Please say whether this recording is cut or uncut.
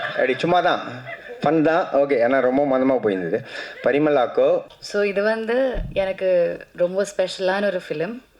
cut